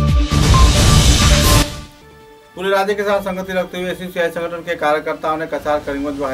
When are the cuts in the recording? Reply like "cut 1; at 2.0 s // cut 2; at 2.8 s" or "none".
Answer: cut 1; at 1.6 s